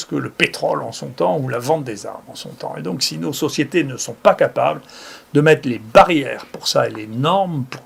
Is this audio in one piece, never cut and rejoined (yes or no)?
yes